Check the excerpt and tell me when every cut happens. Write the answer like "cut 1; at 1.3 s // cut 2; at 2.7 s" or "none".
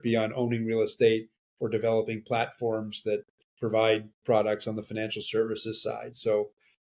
none